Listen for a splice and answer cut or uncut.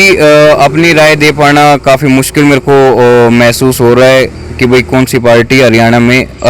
uncut